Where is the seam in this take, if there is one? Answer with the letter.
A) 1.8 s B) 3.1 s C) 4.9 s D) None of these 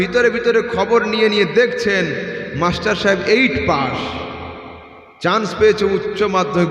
D